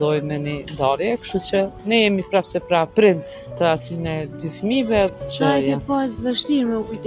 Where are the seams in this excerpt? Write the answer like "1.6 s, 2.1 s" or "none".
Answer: 1.8 s, 2.9 s, 5.1 s